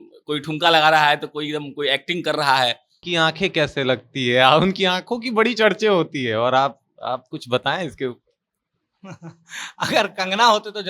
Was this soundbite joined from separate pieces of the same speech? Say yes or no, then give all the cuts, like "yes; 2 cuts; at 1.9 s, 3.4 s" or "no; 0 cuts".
yes; 1 cut; at 2.9 s